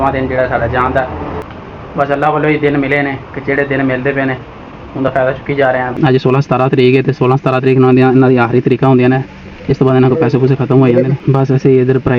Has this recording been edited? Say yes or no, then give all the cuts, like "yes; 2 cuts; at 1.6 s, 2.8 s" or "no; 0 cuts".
yes; 3 cuts; at 1.5 s, 5.9 s, 11.1 s